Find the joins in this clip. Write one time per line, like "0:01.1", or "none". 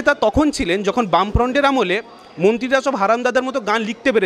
none